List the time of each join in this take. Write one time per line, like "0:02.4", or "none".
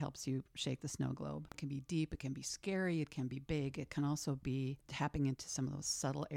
0:01.6
0:04.8